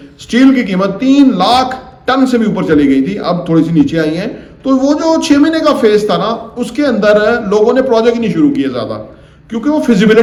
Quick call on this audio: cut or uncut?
uncut